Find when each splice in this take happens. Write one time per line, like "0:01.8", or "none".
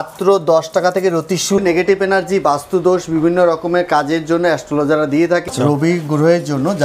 0:01.6
0:05.4